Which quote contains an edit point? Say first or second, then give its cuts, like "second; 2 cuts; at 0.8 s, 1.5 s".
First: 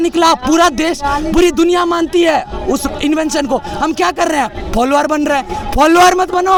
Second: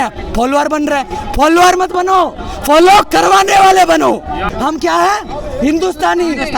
second; 1 cut; at 4.5 s